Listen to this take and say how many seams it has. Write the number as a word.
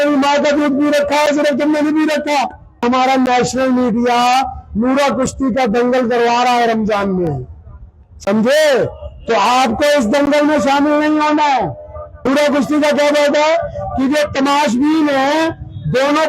two